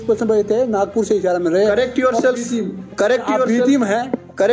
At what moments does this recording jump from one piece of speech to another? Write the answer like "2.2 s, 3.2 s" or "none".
none

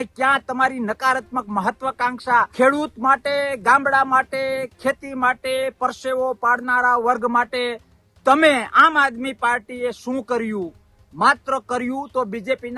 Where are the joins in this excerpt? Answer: 2.5 s

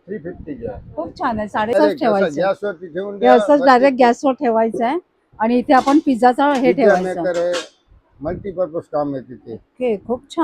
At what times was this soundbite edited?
1.7 s

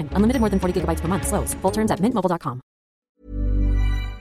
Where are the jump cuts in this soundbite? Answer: 3.2 s

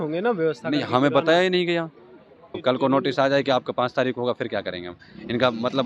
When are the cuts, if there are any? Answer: 2.6 s

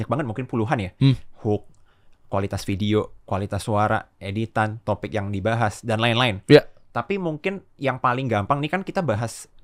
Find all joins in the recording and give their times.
none

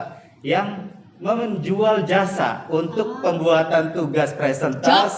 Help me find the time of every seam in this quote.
none

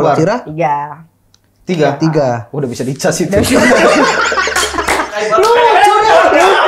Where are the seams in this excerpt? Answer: none

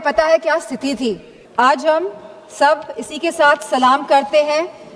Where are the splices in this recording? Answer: 1.3 s

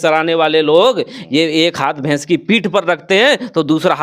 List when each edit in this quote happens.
none

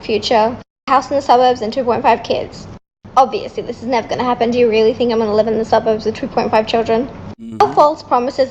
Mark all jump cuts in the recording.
none

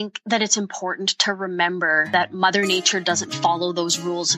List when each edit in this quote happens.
2.1 s

